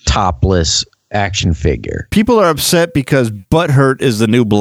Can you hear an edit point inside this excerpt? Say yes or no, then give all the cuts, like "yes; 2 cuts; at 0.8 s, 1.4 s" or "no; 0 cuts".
yes; 1 cut; at 3.4 s